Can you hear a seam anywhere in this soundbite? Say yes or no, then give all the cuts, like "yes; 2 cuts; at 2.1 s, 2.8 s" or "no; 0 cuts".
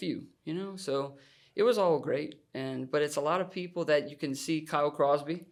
no; 0 cuts